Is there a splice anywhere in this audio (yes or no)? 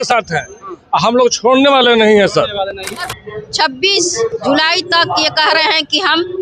yes